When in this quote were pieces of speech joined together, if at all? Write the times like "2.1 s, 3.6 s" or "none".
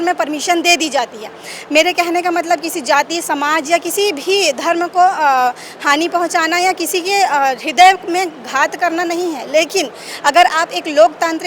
none